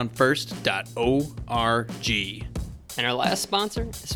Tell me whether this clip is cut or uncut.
cut